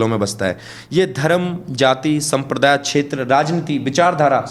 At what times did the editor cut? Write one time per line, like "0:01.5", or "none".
none